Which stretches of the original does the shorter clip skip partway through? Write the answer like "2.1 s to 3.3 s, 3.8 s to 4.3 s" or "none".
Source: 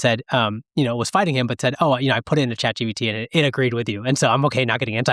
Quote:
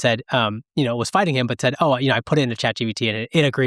none